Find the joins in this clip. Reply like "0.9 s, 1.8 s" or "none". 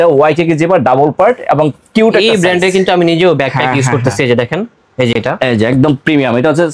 none